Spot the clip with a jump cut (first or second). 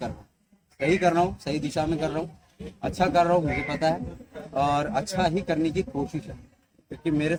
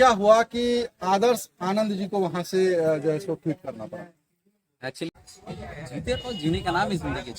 second